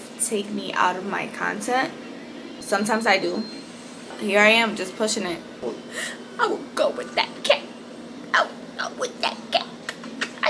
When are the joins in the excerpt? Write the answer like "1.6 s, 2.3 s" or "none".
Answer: 2.5 s, 4.2 s, 5.6 s